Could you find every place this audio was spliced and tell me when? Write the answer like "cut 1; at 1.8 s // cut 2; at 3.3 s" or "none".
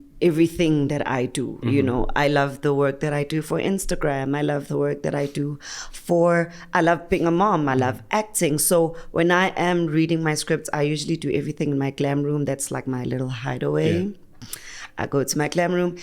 none